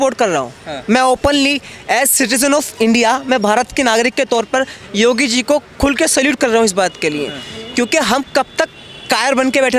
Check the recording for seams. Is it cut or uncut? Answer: uncut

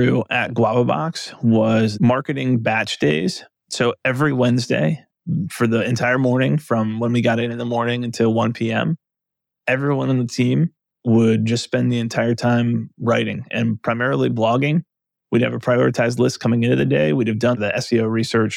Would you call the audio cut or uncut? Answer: cut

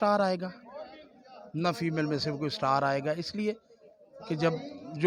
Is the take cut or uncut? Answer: uncut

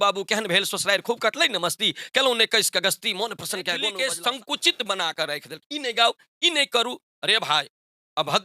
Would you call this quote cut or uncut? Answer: cut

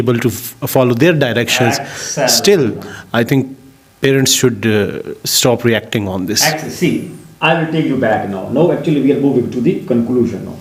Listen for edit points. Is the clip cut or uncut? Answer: uncut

